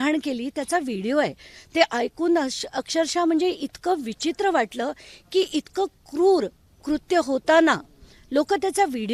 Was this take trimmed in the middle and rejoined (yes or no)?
no